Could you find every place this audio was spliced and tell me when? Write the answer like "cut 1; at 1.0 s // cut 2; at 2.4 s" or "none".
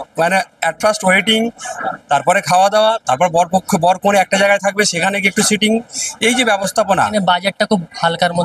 cut 1; at 7.0 s